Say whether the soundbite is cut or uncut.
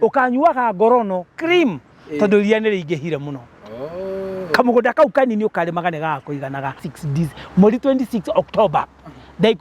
cut